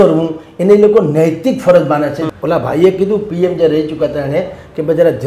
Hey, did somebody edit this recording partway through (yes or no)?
yes